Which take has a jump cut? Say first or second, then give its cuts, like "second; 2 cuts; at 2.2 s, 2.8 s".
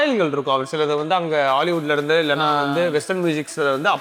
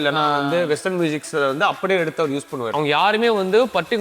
second; 1 cut; at 2.7 s